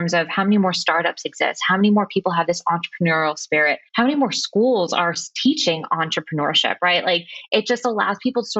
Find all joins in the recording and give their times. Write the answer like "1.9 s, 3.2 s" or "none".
3.8 s